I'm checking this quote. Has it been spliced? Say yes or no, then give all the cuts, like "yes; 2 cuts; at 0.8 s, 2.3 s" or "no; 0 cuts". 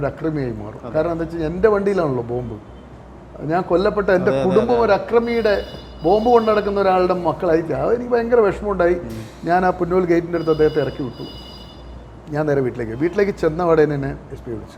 no; 0 cuts